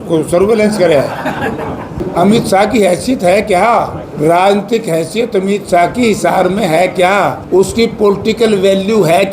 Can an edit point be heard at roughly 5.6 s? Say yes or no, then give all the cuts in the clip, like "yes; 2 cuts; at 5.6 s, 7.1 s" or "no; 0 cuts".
no; 3 cuts; at 2.0 s, 4.0 s, 7.4 s